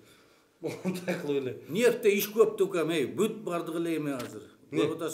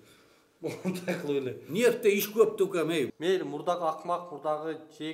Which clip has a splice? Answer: second; 1 cut; at 3.1 s

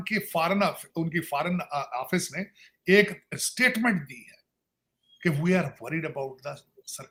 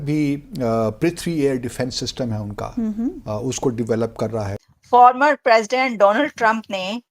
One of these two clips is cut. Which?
second; 1 cut; at 4.6 s

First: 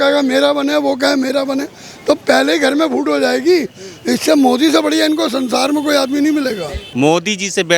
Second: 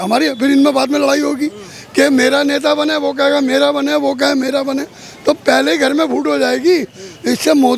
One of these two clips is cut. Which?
first; 1 cut; at 6.8 s

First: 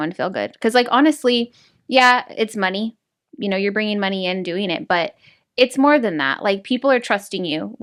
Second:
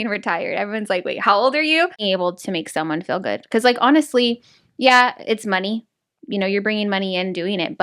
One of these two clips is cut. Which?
second; 1 cut; at 2.0 s

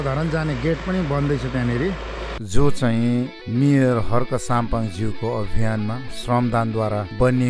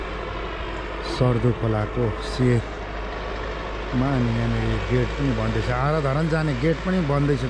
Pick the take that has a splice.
first; 1 cut; at 2.4 s

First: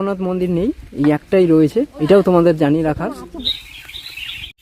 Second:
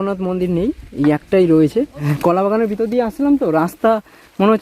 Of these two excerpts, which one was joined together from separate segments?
second; 1 cut; at 1.9 s

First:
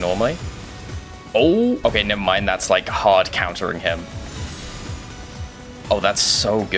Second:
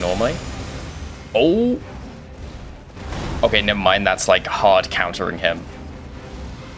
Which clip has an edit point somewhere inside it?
first; 2 cuts; at 1.8 s, 4.1 s

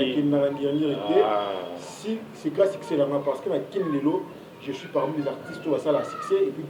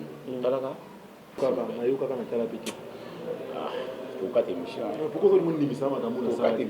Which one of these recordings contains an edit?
second; 1 cut; at 1.4 s

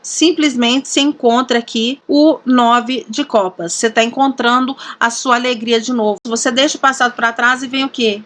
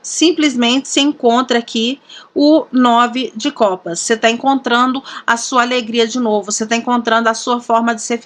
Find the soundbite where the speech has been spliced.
first; 2 cuts; at 2.0 s, 6.2 s

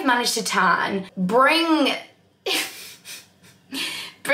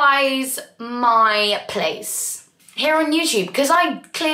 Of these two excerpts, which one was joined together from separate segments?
first; 1 cut; at 1.1 s

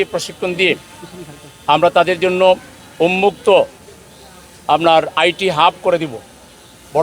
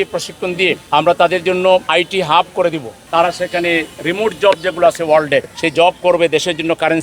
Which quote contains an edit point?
second; 4 cuts; at 0.8 s, 1.9 s, 2.9 s, 5.6 s

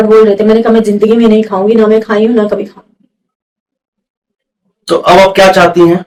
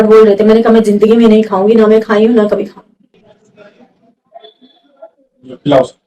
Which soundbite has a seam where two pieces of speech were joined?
second; 1 cut; at 3.2 s

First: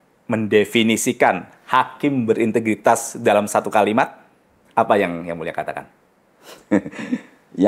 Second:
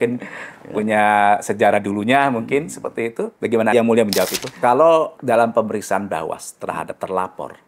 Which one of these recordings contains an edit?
second; 2 cuts; at 4.4 s, 5.2 s

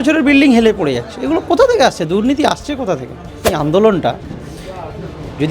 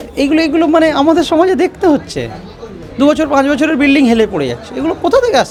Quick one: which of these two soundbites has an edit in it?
first; 1 cut; at 3.5 s

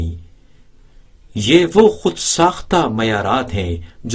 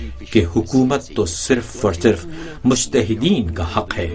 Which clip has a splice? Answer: first; 1 cut; at 2.3 s

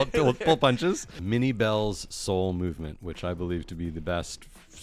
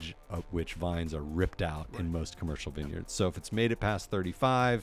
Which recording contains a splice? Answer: first; 1 cut; at 1.1 s

